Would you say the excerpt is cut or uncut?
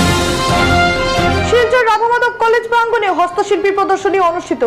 cut